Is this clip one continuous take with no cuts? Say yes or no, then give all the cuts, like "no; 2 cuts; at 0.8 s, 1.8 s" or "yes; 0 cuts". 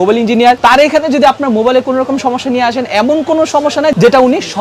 yes; 0 cuts